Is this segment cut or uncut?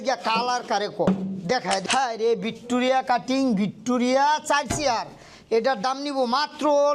cut